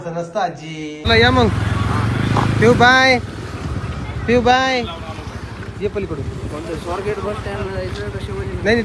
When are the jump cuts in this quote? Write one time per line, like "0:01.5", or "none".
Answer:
0:01.0